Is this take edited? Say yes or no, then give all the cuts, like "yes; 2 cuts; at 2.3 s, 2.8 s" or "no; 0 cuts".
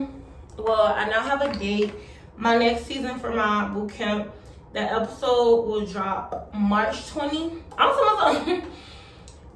no; 0 cuts